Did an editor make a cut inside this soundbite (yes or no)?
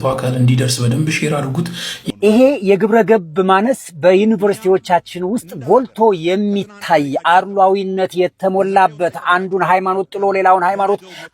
yes